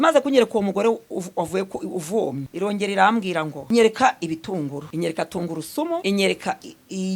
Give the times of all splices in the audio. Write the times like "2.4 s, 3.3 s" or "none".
2.5 s, 3.6 s, 4.8 s, 6.0 s